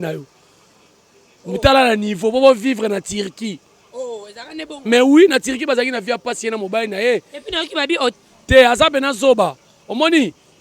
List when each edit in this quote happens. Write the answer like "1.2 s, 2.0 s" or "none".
8.1 s